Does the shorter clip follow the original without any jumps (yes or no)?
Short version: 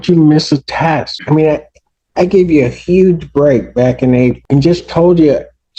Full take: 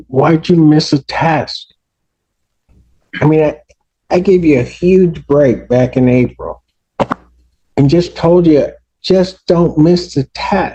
no